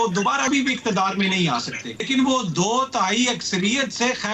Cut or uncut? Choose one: cut